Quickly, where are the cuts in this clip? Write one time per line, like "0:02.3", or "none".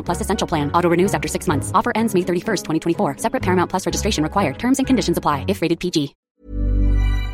0:06.2